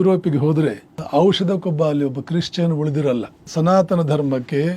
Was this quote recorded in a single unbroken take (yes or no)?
no